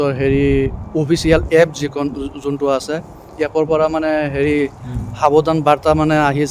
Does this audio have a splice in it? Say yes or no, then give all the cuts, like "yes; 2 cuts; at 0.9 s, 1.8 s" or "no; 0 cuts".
no; 0 cuts